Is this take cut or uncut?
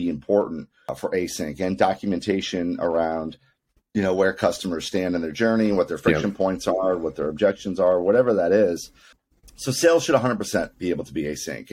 cut